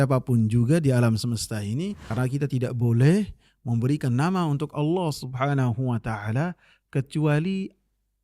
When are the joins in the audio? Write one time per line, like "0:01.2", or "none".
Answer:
0:02.0